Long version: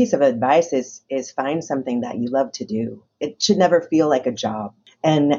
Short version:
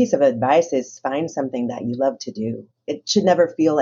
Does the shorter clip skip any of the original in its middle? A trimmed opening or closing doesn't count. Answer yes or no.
yes